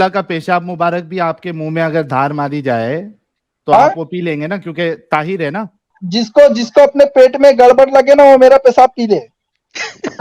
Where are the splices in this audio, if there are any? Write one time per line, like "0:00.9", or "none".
0:06.0